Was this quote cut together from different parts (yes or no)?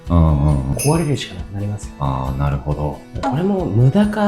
yes